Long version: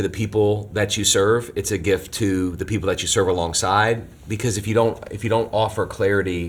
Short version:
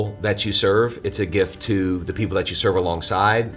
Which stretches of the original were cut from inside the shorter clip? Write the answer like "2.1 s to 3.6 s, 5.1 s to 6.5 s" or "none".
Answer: none